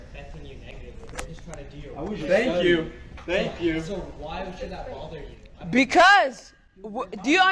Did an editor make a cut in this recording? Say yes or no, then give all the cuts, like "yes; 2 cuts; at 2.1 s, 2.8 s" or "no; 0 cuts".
yes; 2 cuts; at 3.2 s, 5.0 s